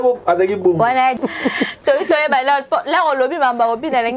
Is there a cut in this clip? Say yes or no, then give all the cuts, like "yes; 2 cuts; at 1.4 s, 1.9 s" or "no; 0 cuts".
yes; 1 cut; at 1.2 s